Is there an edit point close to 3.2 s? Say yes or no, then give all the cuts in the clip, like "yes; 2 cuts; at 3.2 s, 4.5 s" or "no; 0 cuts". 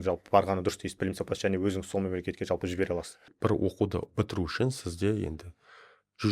yes; 1 cut; at 3.2 s